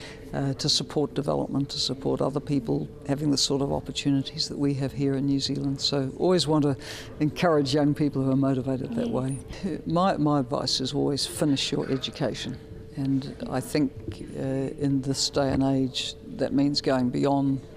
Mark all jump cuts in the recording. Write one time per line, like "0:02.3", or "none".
0:09.5